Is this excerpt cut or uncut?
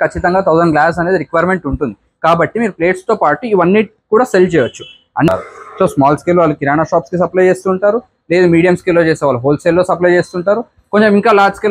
cut